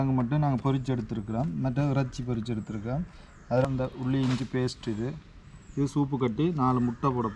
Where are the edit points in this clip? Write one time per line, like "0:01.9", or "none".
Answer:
0:03.6